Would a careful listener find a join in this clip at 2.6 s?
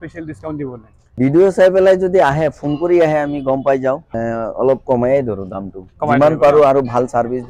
no; 2 cuts; at 1.2 s, 4.1 s

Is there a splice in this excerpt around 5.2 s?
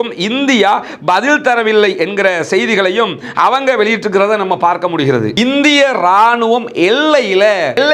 yes; 1 cut; at 5.2 s

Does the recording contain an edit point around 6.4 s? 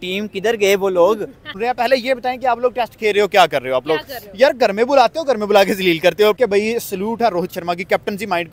yes; 2 cuts; at 1.5 s, 6.4 s

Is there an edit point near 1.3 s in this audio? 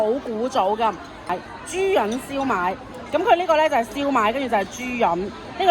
yes; 1 cut; at 1.3 s

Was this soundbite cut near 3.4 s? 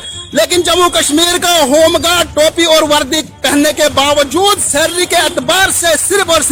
no; 0 cuts

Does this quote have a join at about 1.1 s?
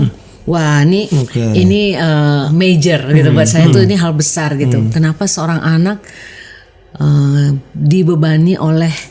yes; 2 cuts; at 1.1 s, 2.5 s

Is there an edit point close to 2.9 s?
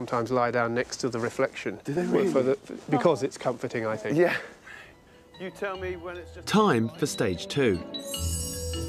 no; 1 cut; at 7.0 s

